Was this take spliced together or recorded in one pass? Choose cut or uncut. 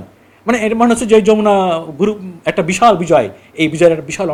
uncut